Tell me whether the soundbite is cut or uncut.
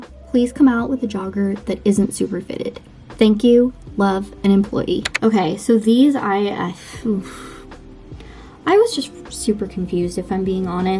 uncut